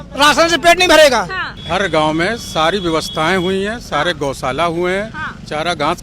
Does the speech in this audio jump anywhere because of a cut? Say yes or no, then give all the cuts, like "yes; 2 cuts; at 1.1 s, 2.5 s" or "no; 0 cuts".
yes; 1 cut; at 1.4 s